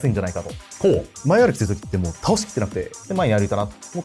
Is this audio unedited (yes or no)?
no